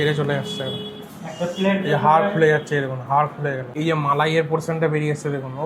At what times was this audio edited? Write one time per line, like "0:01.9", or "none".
0:03.7